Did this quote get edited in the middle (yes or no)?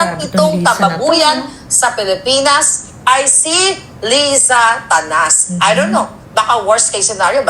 yes